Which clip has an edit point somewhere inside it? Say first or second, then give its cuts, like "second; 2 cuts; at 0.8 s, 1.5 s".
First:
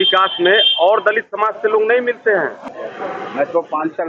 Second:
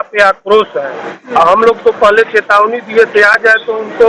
first; 1 cut; at 2.8 s